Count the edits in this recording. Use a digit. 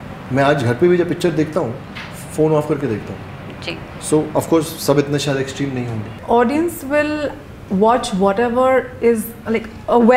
1